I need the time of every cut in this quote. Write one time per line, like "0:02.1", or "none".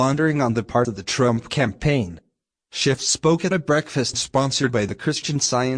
0:02.1